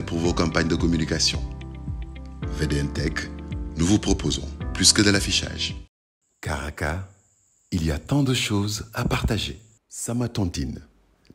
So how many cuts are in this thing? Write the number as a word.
two